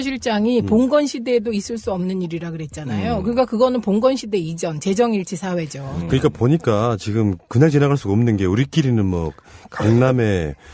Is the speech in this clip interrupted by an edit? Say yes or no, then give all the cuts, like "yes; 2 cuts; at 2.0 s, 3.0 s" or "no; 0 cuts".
yes; 1 cut; at 5.0 s